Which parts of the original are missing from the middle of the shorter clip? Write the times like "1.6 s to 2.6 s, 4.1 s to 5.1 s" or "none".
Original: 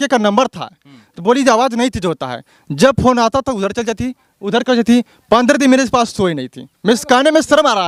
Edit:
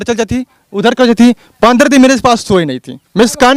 none